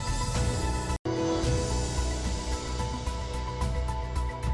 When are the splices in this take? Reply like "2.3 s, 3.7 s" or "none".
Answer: 1.0 s

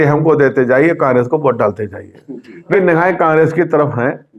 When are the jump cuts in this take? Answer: 2.7 s

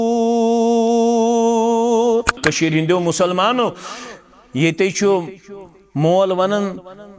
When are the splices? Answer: 2.4 s

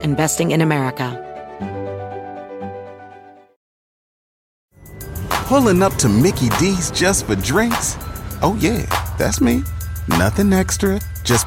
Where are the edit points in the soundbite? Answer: 1.1 s

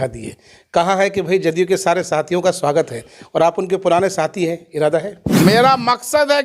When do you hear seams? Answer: 5.3 s

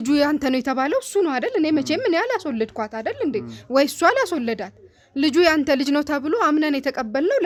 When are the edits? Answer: none

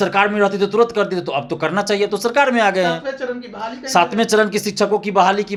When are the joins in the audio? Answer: none

